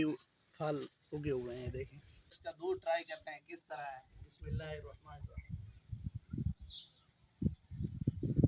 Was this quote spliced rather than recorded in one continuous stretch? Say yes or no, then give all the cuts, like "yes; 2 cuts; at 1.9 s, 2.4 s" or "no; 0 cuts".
yes; 1 cut; at 2.3 s